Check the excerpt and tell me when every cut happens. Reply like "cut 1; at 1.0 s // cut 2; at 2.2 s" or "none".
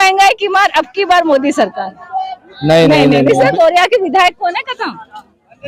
cut 1; at 3.3 s